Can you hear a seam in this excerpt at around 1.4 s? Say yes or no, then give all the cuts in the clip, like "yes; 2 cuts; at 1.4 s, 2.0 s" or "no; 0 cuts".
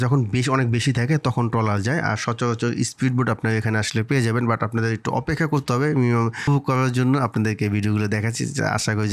no; 1 cut; at 6.5 s